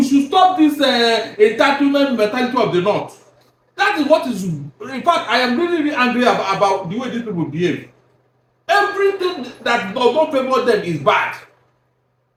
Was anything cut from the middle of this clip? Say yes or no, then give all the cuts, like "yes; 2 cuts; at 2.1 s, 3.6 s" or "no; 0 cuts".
no; 0 cuts